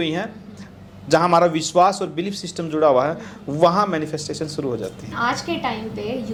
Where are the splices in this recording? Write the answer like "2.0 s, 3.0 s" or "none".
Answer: none